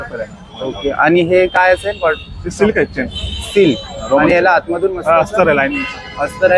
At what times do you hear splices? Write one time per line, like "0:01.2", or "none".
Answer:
none